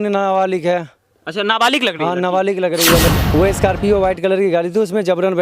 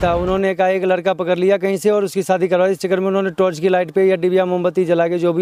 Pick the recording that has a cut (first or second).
first